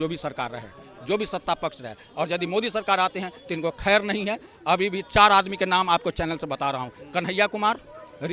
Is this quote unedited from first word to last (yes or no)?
yes